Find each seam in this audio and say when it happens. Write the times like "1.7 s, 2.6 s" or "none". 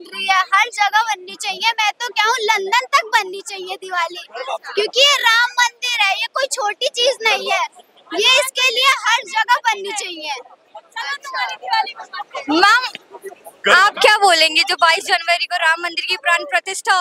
none